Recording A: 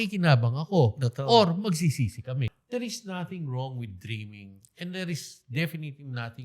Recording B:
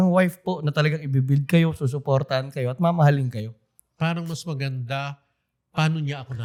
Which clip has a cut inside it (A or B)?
A